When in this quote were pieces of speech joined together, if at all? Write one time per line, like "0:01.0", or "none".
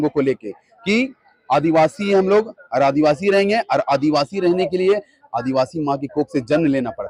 none